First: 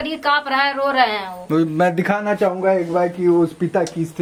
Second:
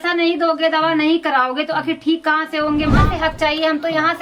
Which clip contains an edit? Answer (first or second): second